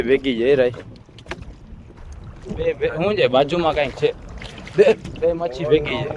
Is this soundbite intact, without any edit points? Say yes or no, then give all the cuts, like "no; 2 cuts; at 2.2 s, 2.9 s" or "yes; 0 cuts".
no; 1 cut; at 2.0 s